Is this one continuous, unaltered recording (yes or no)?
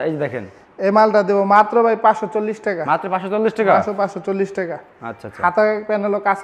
yes